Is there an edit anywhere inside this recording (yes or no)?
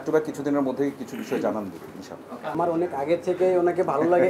no